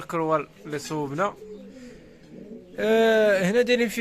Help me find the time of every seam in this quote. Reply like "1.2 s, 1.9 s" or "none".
none